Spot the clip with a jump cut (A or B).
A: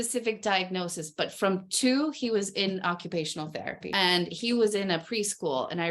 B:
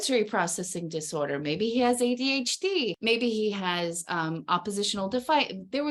A